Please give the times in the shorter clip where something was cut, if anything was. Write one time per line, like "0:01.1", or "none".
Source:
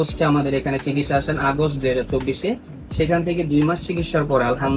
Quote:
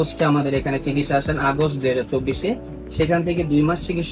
none